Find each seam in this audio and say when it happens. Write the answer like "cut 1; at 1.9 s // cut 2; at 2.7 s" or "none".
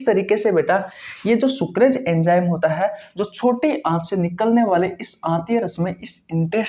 none